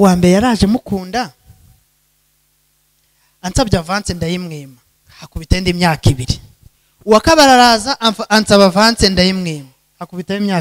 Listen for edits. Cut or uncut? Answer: uncut